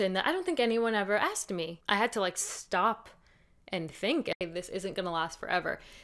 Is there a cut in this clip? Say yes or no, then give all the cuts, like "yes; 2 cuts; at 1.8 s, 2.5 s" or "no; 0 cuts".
yes; 2 cuts; at 1.7 s, 4.4 s